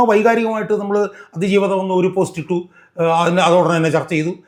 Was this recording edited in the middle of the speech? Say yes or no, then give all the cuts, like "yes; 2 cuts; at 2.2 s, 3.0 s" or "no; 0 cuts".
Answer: no; 0 cuts